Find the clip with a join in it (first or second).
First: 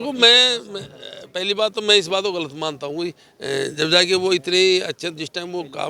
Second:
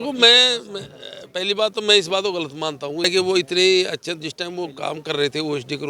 second